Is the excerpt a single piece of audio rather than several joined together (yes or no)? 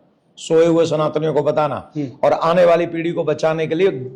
yes